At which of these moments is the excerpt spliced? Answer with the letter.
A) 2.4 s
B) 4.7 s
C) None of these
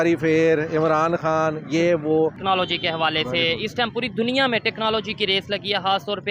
A